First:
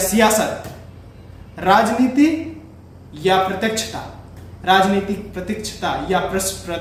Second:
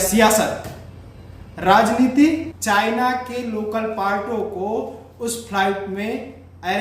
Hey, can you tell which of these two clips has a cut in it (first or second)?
second